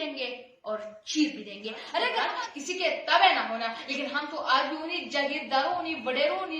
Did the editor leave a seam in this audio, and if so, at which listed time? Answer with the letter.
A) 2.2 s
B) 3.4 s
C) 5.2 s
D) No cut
A